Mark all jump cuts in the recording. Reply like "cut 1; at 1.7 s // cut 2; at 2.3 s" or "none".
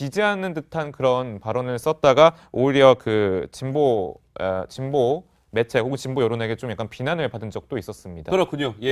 cut 1; at 7.5 s